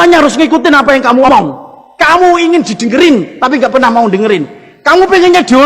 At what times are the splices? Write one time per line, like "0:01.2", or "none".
0:01.3